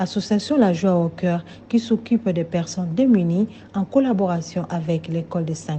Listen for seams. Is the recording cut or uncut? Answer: uncut